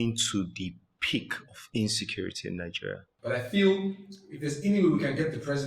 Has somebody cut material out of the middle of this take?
yes; 1 cut; at 3.1 s

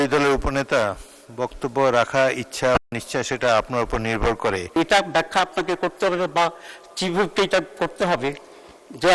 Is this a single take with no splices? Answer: no; 1 cut; at 4.8 s

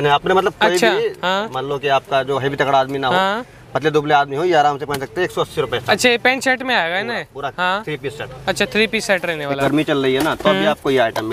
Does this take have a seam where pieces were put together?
yes; 1 cut; at 9.6 s

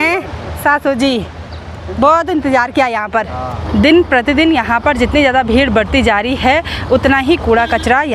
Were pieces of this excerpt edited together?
yes; 1 cut; at 3.6 s

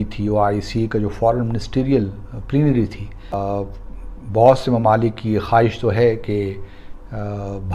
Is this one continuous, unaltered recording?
no; 1 cut; at 3.3 s

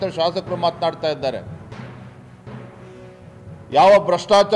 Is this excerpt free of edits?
no; 2 cuts; at 1.5 s, 3.0 s

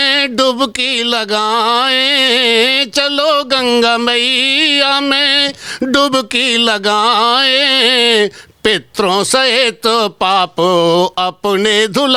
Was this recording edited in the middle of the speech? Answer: no; 0 cuts

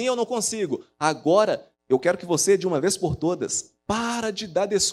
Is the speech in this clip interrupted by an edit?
yes; 1 cut; at 1.7 s

